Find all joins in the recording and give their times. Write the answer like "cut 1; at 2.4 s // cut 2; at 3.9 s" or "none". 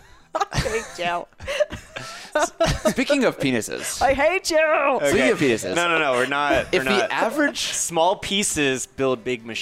none